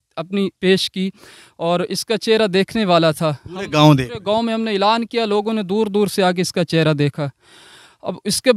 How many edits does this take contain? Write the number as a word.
zero